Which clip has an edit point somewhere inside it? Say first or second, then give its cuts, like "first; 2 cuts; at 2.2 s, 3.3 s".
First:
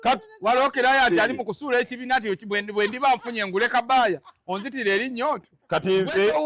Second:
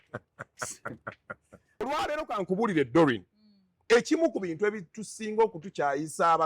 second; 1 cut; at 1.8 s